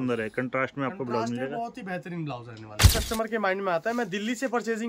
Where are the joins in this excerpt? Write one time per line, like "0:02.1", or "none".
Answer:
0:02.9